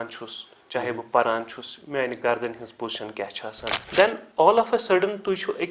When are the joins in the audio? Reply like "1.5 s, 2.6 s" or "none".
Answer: 3.7 s